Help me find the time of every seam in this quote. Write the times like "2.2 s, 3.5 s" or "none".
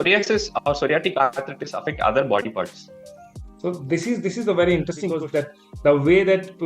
5.1 s